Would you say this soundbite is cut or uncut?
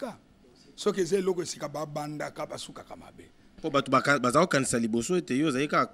cut